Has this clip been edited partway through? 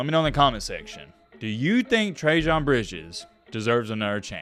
no; 0 cuts

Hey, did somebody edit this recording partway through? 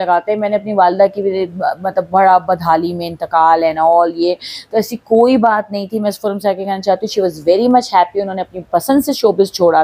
no; 0 cuts

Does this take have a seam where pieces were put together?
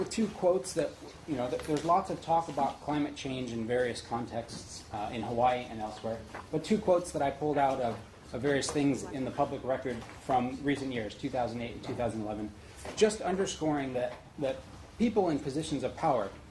no; 0 cuts

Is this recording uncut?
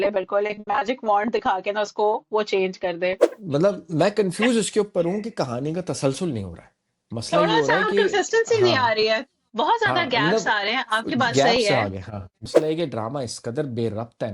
no; 2 cuts; at 3.3 s, 12.4 s

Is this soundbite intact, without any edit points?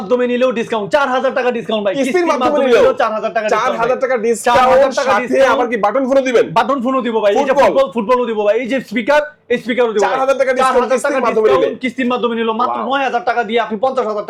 yes; 0 cuts

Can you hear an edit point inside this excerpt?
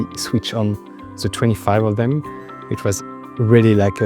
no; 0 cuts

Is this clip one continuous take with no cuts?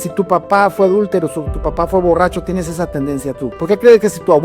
no; 1 cut; at 3.5 s

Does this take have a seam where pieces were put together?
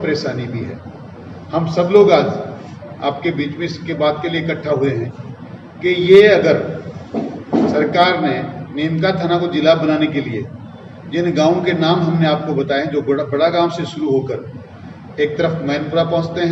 no; 0 cuts

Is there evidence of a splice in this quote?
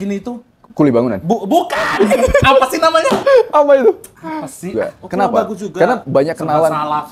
yes; 1 cut; at 4.7 s

